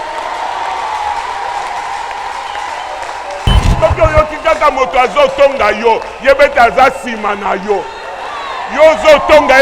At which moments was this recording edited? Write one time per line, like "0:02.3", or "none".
0:03.7